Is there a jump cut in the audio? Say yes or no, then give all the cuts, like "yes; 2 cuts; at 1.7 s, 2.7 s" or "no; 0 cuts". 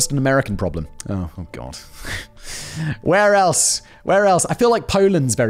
no; 0 cuts